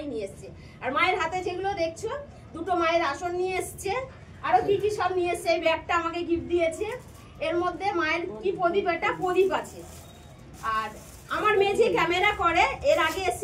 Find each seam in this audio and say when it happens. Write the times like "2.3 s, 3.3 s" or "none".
none